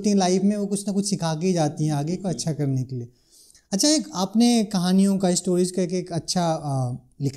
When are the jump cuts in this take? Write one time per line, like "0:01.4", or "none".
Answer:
none

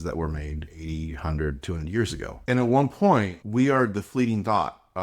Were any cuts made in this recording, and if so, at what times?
0:02.3
0:03.4

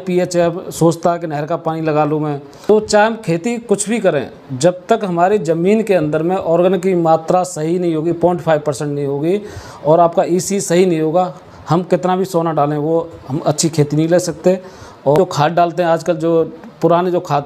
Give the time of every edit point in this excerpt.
0:02.7
0:15.2

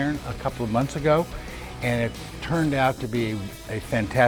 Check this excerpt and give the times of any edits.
none

